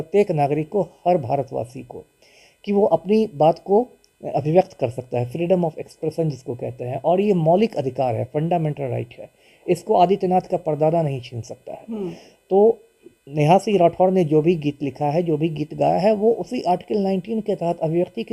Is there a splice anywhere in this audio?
no; 0 cuts

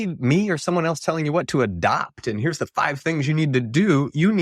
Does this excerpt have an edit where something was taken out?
no; 0 cuts

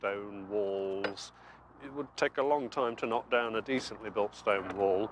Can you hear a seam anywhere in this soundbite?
yes; 1 cut; at 3.2 s

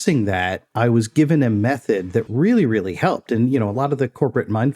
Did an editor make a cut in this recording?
yes; 1 cut; at 2.2 s

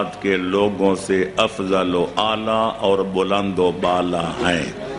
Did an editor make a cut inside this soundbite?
no; 0 cuts

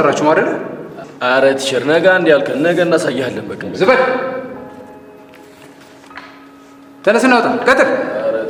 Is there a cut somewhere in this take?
no; 0 cuts

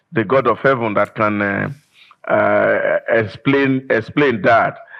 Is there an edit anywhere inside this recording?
no; 0 cuts

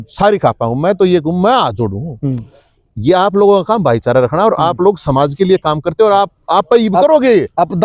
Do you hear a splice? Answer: no; 0 cuts

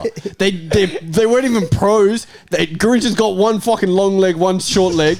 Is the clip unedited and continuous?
yes; 0 cuts

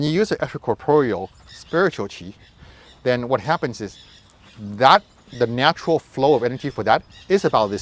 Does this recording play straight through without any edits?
yes; 0 cuts

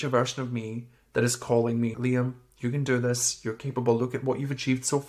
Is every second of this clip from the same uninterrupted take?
no; 1 cut; at 1.9 s

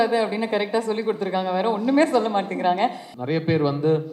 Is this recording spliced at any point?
yes; 1 cut; at 3.1 s

